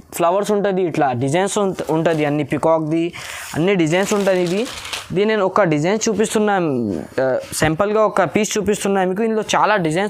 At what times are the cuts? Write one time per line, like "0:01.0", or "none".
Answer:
none